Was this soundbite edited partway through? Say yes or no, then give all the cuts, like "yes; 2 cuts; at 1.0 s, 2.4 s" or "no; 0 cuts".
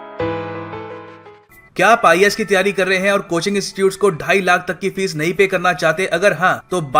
yes; 1 cut; at 1.1 s